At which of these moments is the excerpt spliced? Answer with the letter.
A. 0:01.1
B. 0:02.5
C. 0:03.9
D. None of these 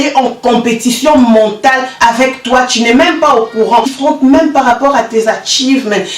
C